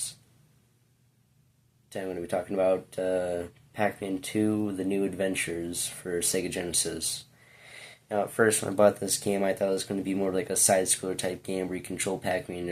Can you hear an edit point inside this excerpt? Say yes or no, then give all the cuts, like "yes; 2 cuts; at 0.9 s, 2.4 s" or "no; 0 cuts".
yes; 1 cut; at 1.1 s